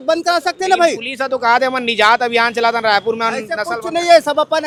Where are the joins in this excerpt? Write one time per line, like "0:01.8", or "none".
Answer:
none